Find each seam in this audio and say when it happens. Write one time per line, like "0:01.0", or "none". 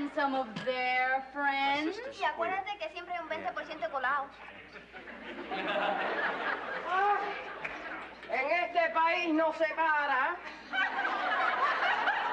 none